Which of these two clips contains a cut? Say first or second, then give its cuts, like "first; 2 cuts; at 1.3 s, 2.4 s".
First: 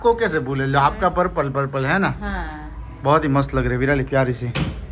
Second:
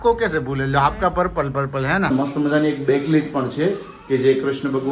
second; 1 cut; at 2.1 s